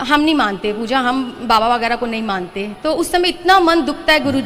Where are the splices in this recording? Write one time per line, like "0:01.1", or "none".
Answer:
none

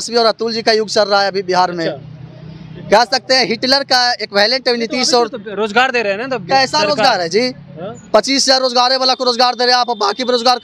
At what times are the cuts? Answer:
none

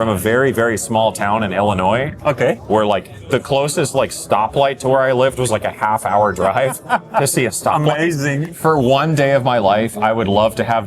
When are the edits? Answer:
0:08.5

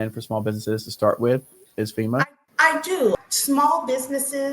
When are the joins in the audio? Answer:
0:02.2
0:03.2

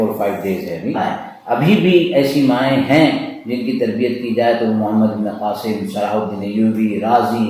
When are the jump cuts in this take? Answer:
0:01.0

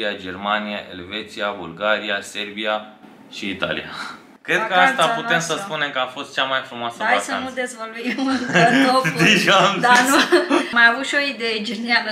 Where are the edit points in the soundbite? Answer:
0:04.1
0:10.7

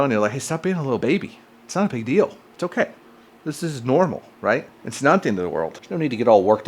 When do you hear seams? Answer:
0:01.0
0:05.7

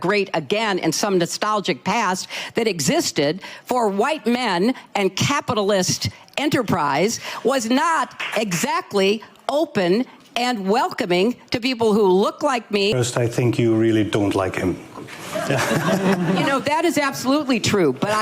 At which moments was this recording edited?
0:13.0

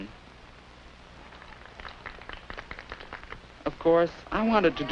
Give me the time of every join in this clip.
0:03.6

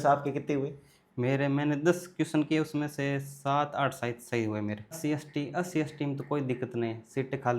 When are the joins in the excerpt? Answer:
0:05.0

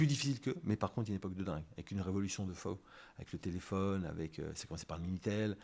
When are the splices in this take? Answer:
none

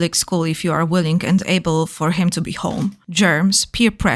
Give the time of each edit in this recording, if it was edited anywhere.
0:03.0

